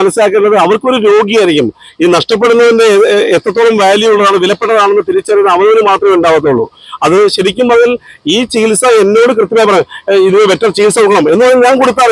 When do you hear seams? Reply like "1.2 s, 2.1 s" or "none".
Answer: none